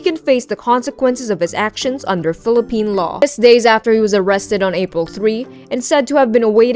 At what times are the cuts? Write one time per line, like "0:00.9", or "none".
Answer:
none